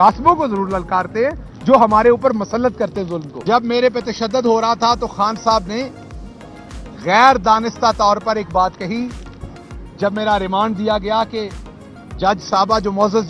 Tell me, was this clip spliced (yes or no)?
yes